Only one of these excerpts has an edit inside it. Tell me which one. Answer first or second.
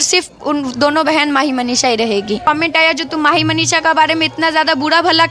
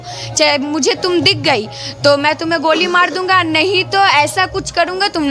first